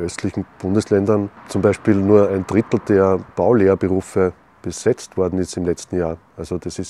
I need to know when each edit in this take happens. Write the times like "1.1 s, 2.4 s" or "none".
1.4 s, 3.3 s